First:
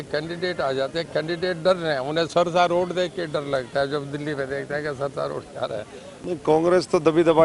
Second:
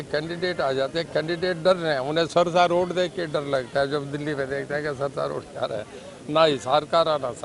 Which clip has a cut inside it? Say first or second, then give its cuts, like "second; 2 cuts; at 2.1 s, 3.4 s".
first; 1 cut; at 6.1 s